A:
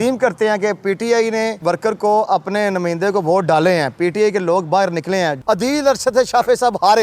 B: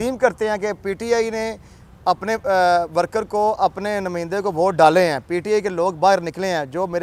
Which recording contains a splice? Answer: A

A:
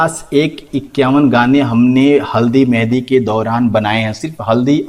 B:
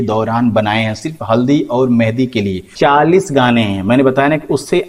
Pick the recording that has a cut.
B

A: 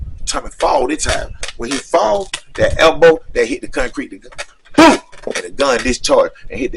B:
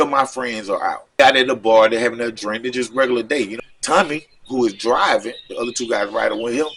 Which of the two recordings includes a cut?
B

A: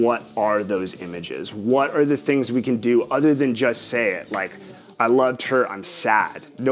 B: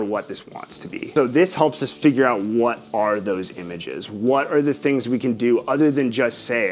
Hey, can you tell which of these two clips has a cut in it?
B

